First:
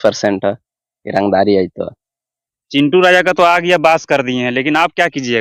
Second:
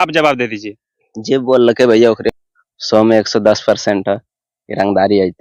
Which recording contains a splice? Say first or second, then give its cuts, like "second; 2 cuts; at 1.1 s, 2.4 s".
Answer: second; 1 cut; at 2.3 s